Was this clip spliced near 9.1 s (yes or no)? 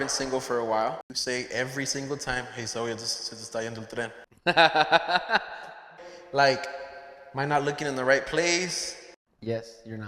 no